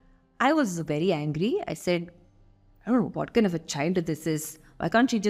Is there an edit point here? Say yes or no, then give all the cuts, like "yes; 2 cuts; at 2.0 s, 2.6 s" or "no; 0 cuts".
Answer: no; 0 cuts